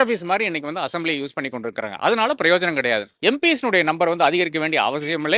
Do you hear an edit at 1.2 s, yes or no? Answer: no